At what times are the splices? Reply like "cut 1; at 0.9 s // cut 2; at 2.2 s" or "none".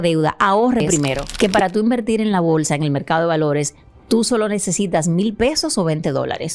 cut 1; at 1.2 s